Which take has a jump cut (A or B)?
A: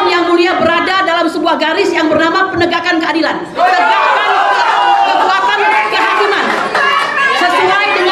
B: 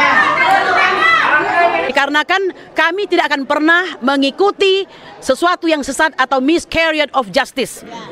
B